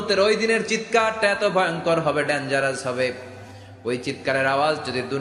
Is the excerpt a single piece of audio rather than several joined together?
yes; 0 cuts

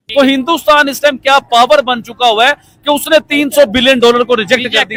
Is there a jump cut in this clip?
no; 0 cuts

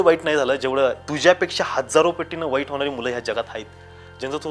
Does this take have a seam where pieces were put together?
yes; 1 cut; at 1.1 s

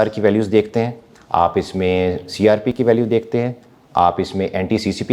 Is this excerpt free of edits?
yes; 0 cuts

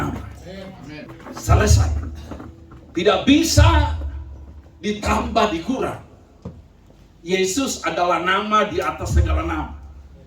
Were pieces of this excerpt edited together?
yes; 1 cut; at 1.1 s

